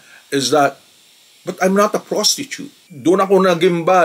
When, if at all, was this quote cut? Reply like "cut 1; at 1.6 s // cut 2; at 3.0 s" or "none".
cut 1; at 2.9 s